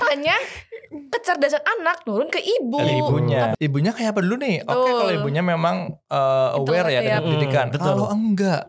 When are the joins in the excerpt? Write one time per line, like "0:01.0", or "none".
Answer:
0:03.5